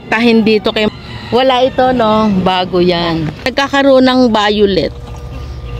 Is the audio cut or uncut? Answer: cut